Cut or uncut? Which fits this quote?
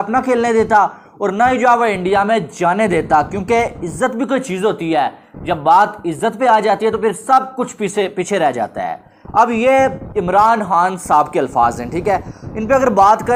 uncut